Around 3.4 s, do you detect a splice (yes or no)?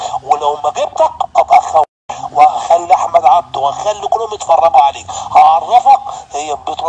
no